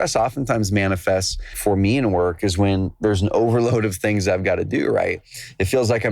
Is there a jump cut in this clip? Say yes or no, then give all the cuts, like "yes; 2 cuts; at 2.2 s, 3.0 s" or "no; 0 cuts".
yes; 1 cut; at 1.5 s